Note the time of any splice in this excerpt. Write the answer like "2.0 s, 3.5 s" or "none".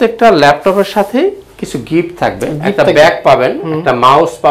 none